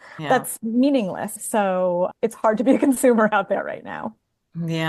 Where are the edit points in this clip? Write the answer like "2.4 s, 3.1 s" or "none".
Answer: 1.3 s, 2.1 s